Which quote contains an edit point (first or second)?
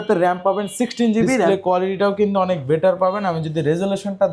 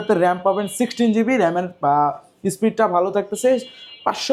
first